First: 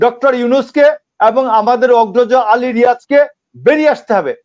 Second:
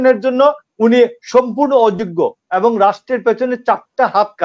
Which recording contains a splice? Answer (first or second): second